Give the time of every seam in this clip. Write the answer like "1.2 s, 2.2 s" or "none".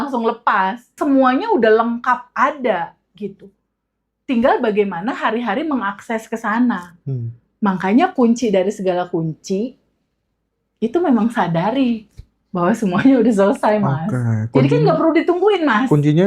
1.0 s